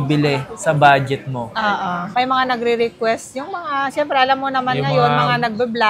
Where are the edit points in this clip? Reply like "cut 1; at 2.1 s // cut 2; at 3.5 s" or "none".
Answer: cut 1; at 2.1 s